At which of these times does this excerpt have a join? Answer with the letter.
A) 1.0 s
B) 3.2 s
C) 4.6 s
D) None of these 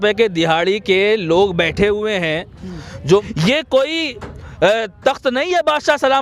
B